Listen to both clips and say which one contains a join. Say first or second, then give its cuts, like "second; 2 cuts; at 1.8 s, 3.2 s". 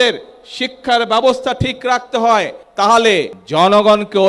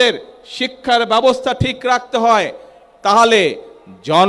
first; 2 cuts; at 2.6 s, 3.4 s